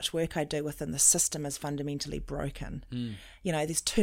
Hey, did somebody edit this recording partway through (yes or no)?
no